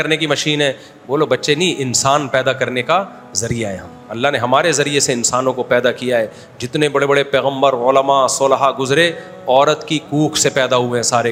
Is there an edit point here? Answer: no; 0 cuts

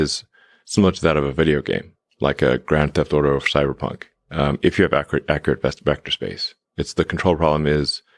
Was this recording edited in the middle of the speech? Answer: no; 0 cuts

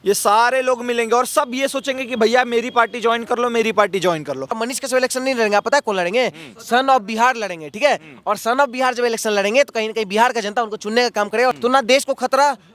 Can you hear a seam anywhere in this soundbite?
yes; 2 cuts; at 4.6 s, 11.6 s

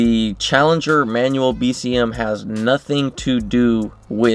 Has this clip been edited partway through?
no; 0 cuts

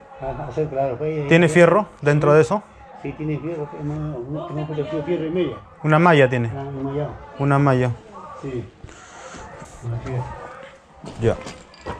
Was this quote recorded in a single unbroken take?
yes; 0 cuts

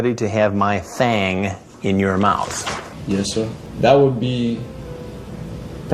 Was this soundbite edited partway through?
yes; 1 cut; at 3.7 s

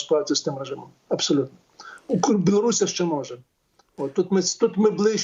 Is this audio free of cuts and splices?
yes; 0 cuts

